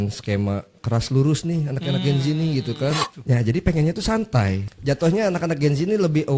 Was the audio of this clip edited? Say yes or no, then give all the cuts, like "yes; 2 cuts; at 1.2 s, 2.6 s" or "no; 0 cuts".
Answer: yes; 1 cut; at 3.1 s